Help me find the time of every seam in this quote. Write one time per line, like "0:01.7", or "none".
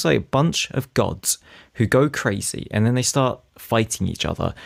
none